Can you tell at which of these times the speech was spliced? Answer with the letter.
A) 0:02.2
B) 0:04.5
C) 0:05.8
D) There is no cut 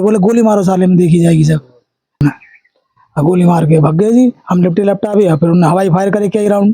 A